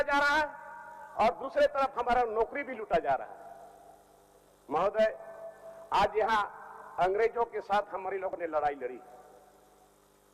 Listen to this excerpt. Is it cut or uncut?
uncut